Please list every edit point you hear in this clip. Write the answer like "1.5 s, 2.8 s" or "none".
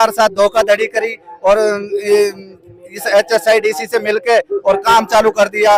none